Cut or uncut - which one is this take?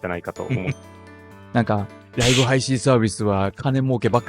cut